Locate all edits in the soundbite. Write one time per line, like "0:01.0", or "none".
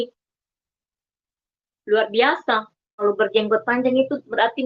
0:03.0